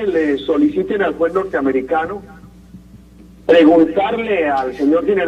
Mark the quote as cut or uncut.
cut